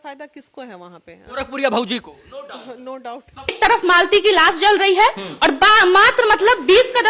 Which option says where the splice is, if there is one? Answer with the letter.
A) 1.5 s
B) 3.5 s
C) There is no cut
B